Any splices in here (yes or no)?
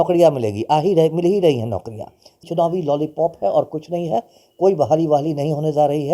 yes